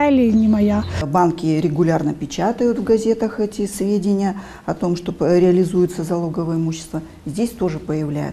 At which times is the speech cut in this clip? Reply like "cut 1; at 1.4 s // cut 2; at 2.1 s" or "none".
cut 1; at 1.0 s